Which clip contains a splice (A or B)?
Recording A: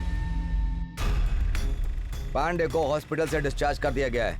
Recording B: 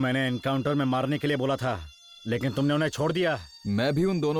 A